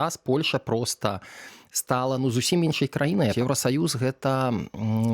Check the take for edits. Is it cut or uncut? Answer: cut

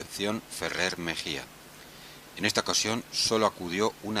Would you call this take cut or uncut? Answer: uncut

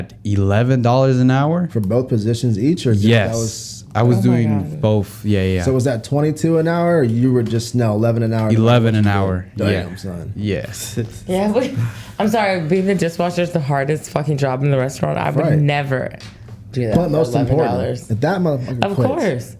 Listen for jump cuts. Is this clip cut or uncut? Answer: uncut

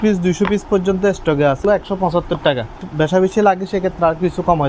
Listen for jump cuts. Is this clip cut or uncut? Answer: cut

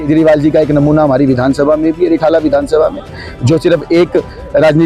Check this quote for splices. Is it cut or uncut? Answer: uncut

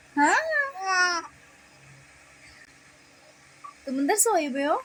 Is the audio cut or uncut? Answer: uncut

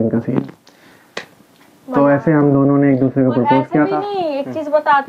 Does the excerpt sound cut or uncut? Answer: uncut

